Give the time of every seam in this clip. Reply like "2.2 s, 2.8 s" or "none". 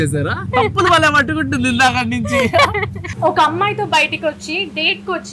3.0 s